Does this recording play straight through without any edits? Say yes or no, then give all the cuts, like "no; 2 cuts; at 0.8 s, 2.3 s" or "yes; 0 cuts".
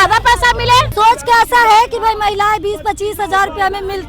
no; 1 cut; at 0.9 s